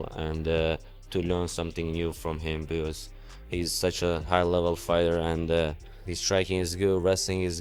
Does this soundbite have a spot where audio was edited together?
no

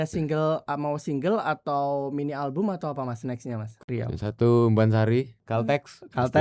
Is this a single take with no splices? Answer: no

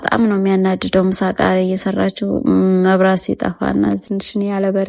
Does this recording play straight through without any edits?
no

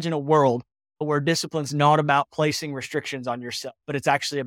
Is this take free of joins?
no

